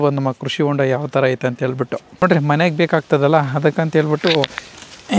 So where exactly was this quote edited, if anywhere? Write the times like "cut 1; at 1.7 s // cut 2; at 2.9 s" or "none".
cut 1; at 2.2 s